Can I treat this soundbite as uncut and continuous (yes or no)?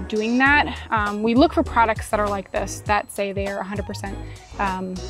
yes